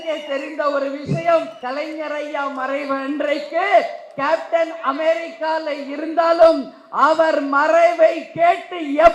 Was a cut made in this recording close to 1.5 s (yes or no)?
yes